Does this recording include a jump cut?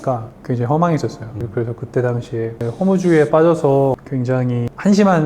yes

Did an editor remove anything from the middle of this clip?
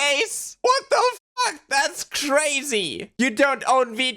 yes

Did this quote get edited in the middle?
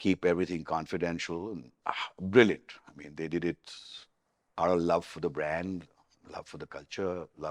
yes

